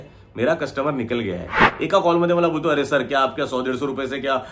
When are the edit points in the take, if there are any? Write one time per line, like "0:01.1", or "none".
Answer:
0:01.7